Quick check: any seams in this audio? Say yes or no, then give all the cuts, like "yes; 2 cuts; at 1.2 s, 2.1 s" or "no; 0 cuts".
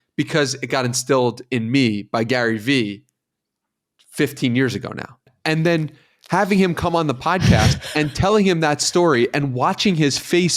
yes; 1 cut; at 5.3 s